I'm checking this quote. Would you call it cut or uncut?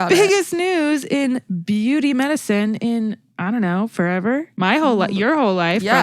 uncut